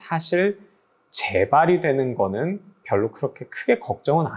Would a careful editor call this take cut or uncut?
uncut